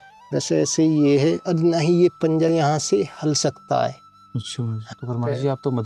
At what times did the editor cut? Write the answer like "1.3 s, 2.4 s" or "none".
4.8 s